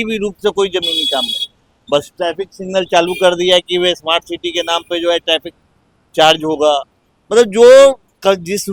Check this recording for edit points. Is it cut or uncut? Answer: uncut